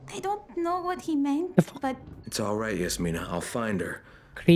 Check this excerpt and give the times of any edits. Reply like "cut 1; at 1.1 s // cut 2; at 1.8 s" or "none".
cut 1; at 2.1 s